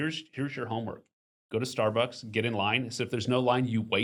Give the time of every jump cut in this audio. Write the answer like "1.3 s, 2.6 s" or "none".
none